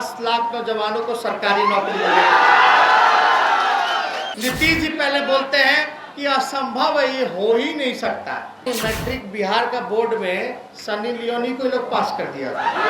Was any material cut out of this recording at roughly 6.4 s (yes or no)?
no